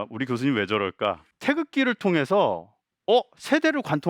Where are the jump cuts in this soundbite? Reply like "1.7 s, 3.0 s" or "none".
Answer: 1.3 s